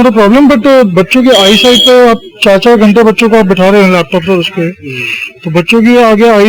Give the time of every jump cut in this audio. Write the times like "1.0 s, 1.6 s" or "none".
none